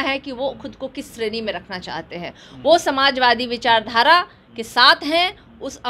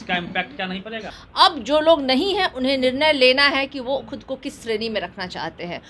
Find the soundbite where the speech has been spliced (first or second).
second